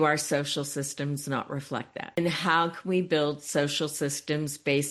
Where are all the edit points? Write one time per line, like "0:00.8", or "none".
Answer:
0:02.1